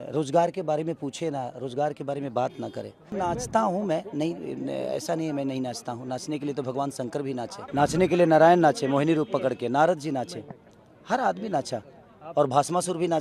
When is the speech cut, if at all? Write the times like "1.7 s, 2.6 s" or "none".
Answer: 3.1 s, 7.6 s